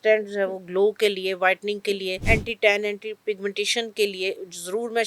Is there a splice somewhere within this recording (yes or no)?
yes